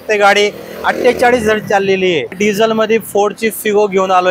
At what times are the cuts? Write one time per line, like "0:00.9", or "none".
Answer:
0:02.4